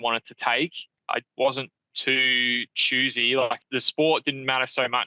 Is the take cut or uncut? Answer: cut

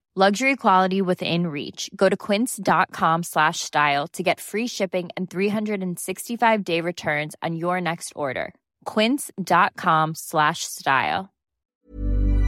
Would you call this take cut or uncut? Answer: cut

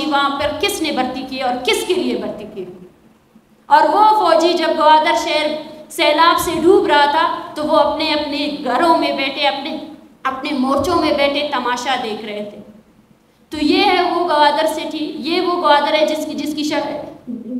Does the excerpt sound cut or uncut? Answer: uncut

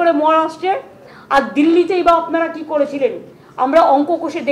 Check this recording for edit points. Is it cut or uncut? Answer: cut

